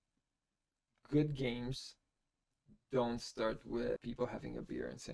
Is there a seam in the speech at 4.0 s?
yes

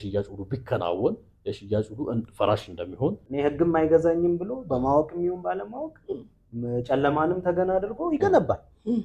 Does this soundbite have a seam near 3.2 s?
yes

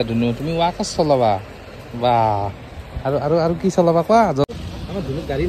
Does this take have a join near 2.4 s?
no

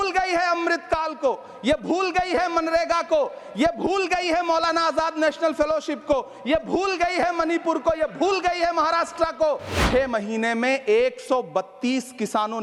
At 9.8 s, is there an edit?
yes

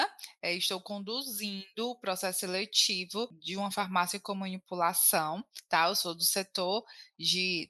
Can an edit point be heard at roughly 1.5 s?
no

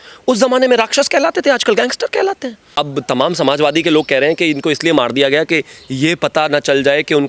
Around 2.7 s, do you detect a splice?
yes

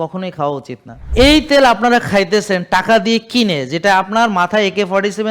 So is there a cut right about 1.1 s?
yes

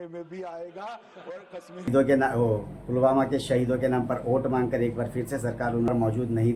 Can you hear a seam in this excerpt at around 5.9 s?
yes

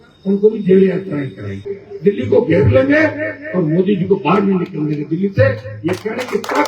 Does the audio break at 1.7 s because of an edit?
yes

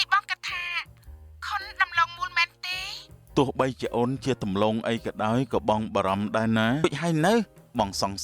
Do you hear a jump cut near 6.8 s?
yes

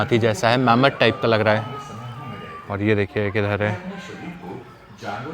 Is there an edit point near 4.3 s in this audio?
no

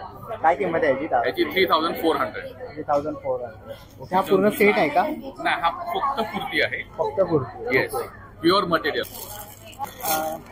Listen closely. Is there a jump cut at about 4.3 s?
no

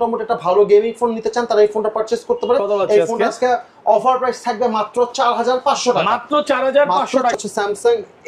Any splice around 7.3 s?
yes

